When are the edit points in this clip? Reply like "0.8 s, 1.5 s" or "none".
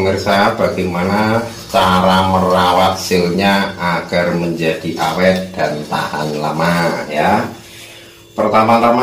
none

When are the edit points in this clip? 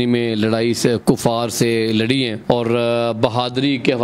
none

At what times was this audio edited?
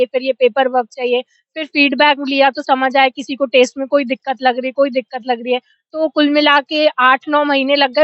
none

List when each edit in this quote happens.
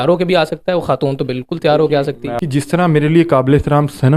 2.4 s

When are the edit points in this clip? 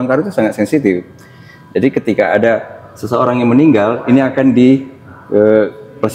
none

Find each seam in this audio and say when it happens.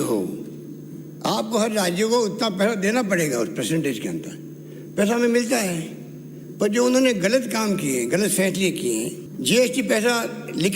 9.2 s

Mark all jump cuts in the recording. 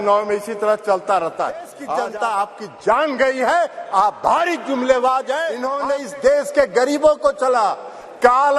1.8 s, 5.6 s

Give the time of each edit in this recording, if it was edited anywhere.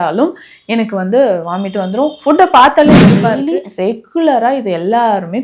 3.4 s

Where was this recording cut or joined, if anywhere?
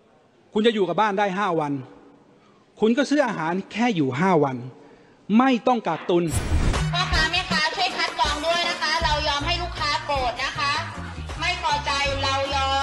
6.6 s

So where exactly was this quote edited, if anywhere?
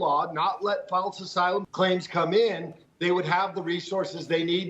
1.7 s

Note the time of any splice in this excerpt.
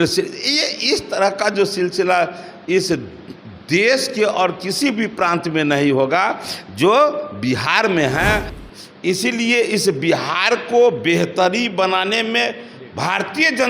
8.6 s

